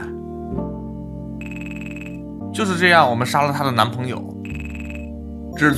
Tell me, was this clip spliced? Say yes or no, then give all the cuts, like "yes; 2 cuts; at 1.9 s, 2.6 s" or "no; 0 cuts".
no; 0 cuts